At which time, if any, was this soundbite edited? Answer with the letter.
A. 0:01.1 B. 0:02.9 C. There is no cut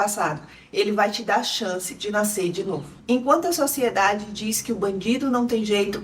B